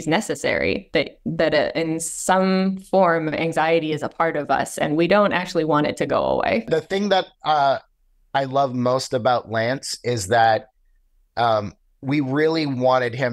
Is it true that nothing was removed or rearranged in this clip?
no; 1 cut; at 6.6 s

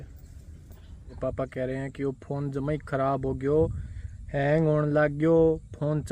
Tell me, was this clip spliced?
yes; 1 cut; at 1.1 s

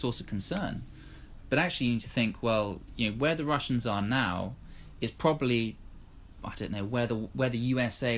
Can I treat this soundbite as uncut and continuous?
yes; 0 cuts

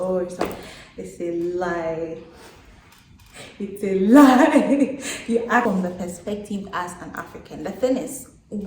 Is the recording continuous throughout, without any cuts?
no; 1 cut; at 5.6 s

